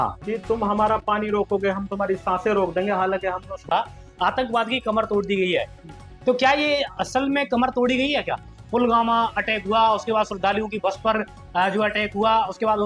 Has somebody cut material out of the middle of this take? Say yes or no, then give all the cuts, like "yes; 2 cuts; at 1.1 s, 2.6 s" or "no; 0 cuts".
yes; 1 cut; at 3.6 s